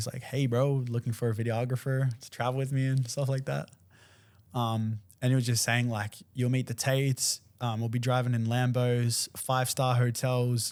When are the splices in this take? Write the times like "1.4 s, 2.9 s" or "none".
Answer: none